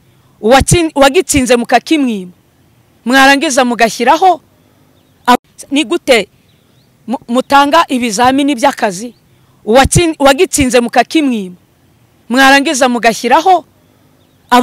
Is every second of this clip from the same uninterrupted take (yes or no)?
no